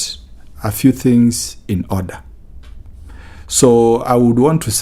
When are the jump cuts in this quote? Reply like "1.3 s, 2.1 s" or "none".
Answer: none